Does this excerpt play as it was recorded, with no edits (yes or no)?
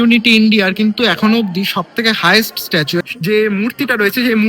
no